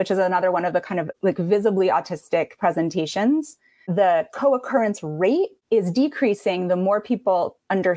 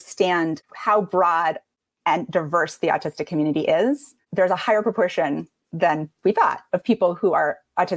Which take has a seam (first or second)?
first